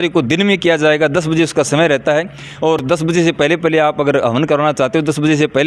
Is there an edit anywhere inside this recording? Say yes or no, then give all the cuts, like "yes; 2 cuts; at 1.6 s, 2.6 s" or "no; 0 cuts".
no; 0 cuts